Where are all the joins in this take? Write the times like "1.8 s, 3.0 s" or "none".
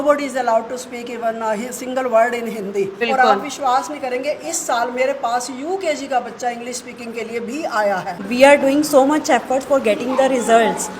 3.0 s, 8.2 s